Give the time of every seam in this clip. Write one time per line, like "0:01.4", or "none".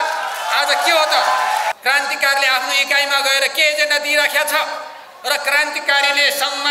0:01.7

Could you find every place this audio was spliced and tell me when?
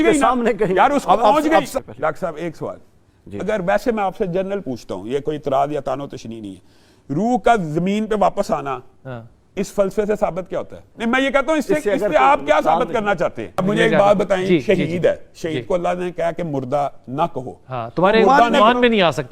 0:01.7
0:10.8
0:13.6

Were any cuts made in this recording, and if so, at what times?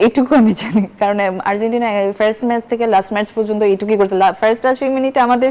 none

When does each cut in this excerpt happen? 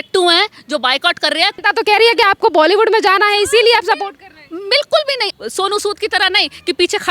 0:01.6
0:05.3

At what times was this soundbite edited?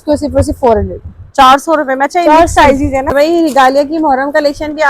0:03.1

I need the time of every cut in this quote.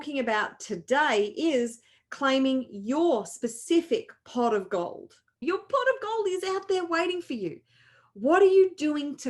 0:05.4

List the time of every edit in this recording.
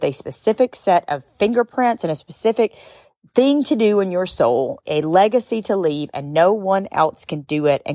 0:04.8

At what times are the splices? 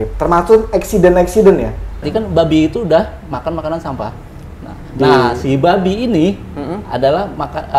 0:02.1

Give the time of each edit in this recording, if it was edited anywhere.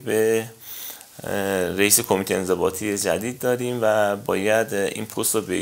none

